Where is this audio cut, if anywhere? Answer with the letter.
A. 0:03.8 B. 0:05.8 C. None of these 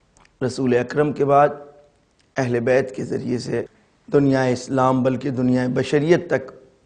A